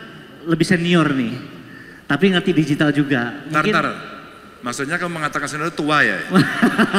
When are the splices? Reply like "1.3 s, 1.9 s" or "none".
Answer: none